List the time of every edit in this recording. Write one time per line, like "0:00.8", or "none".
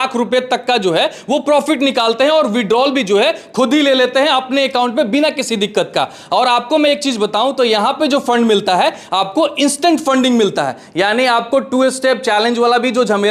none